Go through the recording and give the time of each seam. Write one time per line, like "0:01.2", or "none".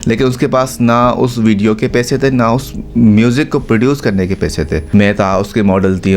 0:04.8